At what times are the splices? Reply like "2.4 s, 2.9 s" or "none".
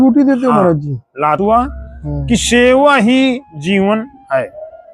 1.4 s